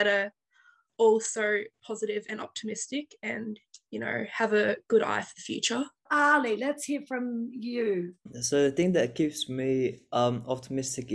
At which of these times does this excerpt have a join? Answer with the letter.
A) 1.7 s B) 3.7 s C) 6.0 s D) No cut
C